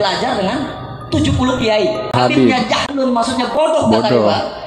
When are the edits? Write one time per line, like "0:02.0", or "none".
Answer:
0:02.1